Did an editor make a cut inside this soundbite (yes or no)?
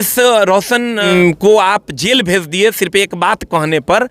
yes